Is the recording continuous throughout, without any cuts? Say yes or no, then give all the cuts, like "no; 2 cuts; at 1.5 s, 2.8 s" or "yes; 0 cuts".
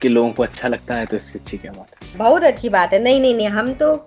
no; 1 cut; at 2.1 s